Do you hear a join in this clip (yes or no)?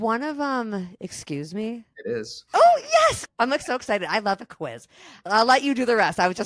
yes